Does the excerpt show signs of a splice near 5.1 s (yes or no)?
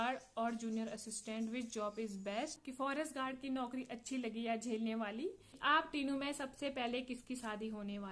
yes